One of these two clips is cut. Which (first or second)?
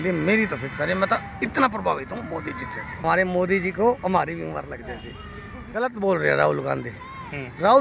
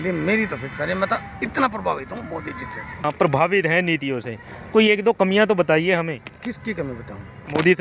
first